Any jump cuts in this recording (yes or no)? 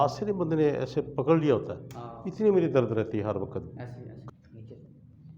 yes